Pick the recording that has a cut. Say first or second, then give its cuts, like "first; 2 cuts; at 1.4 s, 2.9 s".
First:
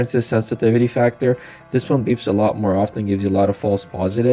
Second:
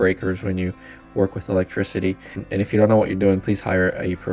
second; 1 cut; at 2.4 s